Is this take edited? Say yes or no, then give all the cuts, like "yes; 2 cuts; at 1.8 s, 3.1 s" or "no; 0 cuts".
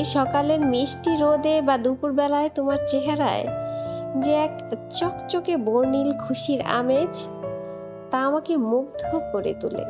no; 0 cuts